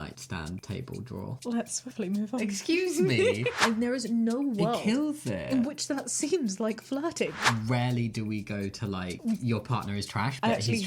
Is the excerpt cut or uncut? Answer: cut